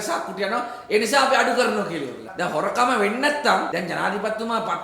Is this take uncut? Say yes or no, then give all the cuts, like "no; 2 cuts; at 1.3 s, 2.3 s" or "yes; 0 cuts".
no; 2 cuts; at 2.3 s, 3.7 s